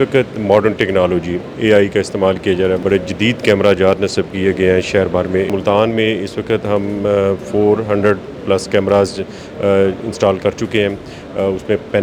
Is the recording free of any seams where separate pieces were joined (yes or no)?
no